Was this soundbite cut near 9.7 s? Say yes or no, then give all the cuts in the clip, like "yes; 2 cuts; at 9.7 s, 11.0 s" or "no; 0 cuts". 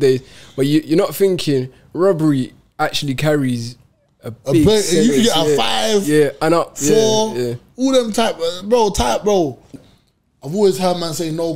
yes; 1 cut; at 9.7 s